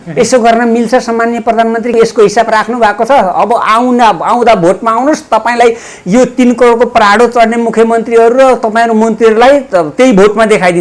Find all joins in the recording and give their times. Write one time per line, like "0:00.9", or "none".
none

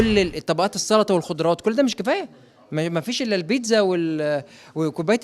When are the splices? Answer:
none

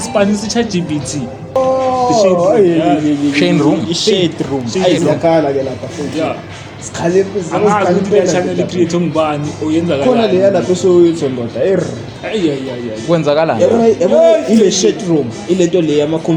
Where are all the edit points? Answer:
0:01.6

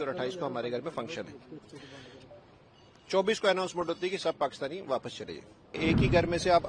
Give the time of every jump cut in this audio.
0:05.8

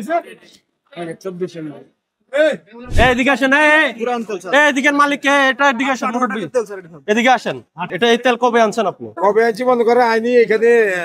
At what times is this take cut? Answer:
0:02.8
0:07.9

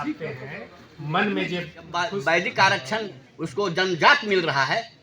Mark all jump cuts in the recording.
0:02.0

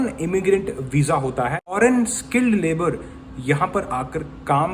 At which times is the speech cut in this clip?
0:01.7

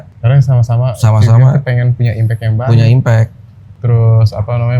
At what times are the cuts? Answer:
none

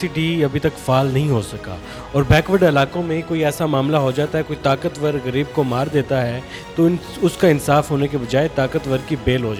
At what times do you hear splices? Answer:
none

